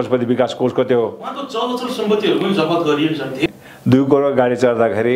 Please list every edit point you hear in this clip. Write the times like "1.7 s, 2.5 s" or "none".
3.5 s